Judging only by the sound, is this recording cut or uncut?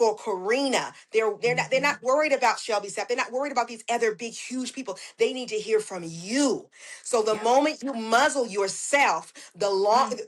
uncut